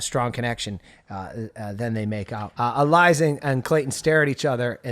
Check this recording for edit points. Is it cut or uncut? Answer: cut